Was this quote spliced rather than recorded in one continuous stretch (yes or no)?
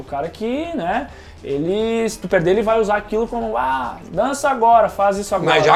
no